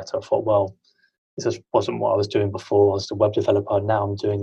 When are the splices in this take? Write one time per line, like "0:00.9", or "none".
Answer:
none